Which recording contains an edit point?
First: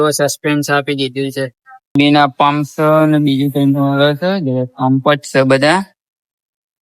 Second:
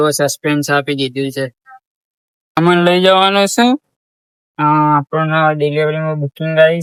first; 1 cut; at 1.9 s

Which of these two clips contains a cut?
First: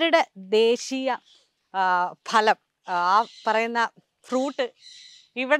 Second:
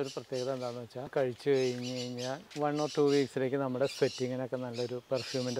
second; 2 cuts; at 1.1 s, 2.4 s

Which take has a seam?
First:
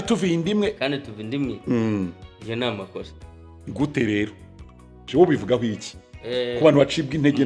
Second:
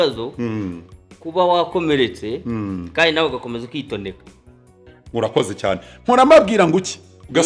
first; 1 cut; at 5.1 s

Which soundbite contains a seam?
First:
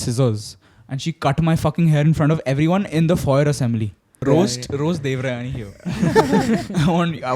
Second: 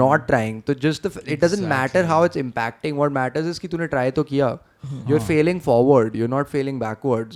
first; 1 cut; at 4.2 s

